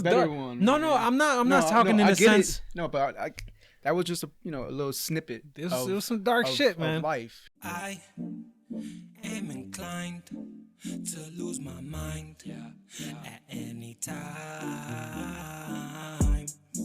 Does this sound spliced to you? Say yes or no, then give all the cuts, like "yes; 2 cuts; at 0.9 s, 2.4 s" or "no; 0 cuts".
yes; 1 cut; at 7.4 s